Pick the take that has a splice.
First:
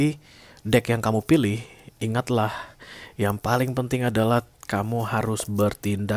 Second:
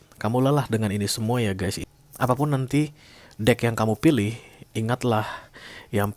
second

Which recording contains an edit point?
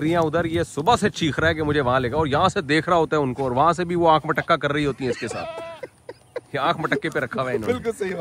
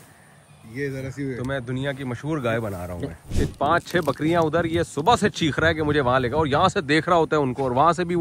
second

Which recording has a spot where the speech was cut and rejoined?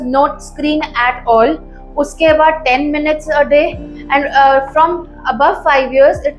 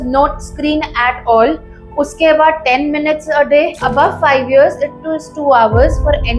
second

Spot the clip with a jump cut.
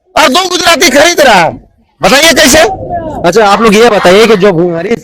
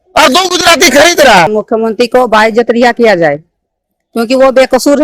second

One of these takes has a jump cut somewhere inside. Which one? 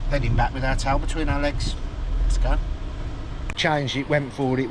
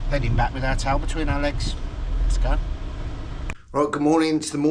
first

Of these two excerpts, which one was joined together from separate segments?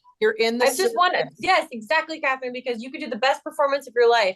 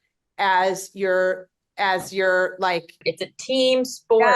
second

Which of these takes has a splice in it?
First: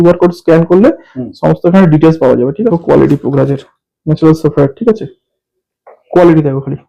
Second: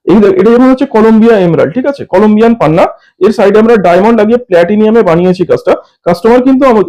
first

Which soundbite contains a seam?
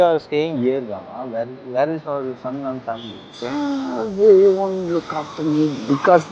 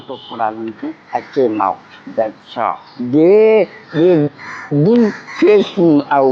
second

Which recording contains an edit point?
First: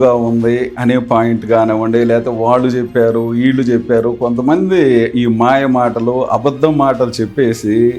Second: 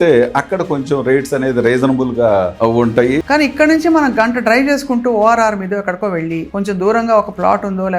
second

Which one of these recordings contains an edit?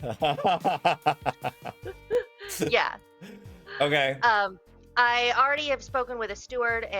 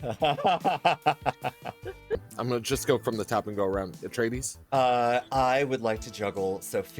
second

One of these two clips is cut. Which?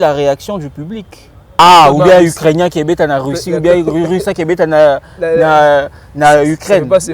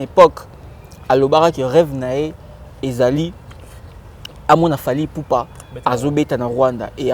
first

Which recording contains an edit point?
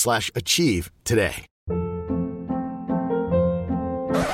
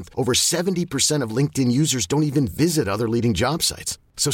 first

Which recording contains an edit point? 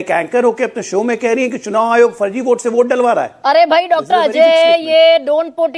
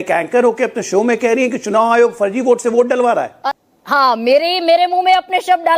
second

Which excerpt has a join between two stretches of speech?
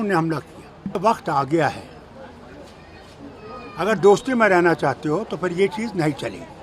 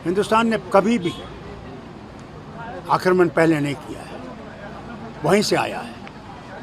first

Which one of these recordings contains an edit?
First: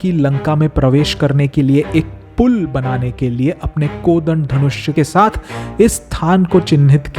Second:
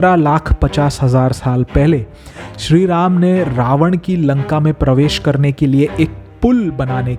first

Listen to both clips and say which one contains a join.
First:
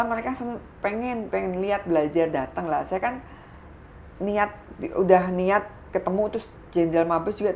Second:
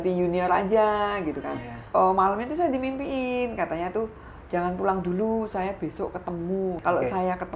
second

